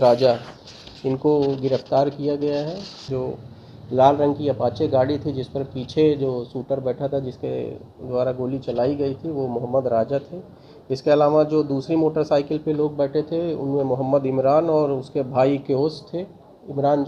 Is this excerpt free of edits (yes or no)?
no